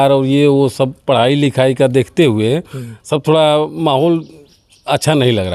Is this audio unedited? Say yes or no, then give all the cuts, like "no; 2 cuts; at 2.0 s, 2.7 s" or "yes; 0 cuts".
yes; 0 cuts